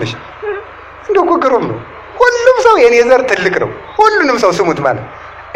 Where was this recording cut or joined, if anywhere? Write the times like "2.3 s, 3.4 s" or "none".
none